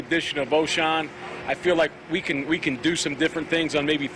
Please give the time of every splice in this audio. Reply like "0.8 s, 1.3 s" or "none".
none